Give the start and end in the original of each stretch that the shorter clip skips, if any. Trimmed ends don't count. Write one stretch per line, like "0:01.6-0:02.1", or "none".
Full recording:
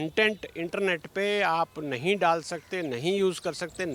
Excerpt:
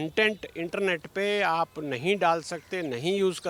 none